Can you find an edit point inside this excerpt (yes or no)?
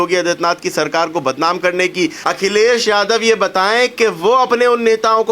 yes